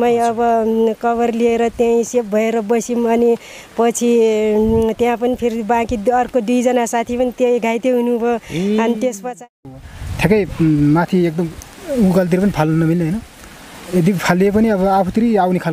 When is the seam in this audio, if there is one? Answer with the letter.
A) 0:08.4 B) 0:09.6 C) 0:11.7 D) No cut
B